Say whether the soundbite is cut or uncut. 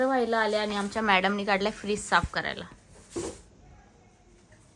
uncut